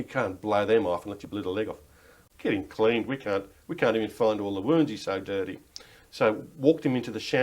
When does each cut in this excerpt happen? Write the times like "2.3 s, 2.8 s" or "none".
2.2 s